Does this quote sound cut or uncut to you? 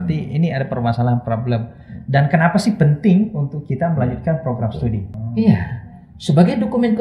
cut